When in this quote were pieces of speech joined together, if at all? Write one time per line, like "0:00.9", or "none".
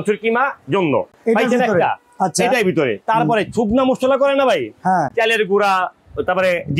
none